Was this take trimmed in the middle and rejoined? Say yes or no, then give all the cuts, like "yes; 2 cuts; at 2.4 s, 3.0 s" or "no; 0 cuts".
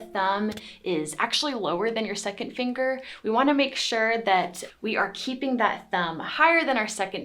no; 0 cuts